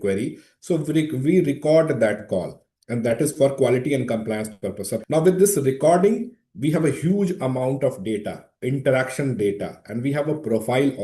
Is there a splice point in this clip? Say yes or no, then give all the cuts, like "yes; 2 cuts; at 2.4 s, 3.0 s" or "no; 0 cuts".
yes; 1 cut; at 4.9 s